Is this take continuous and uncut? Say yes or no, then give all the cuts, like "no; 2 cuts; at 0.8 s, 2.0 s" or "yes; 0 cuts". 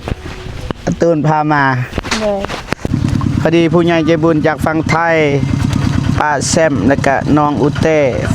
no; 1 cut; at 2.9 s